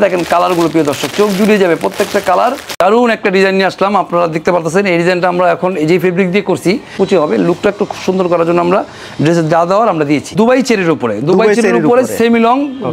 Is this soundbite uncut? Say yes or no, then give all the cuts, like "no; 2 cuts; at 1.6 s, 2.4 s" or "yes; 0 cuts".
no; 3 cuts; at 2.8 s, 6.9 s, 10.3 s